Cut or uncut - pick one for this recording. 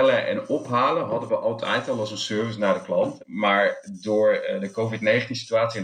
cut